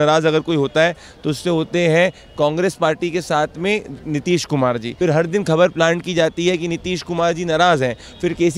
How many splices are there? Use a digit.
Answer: 1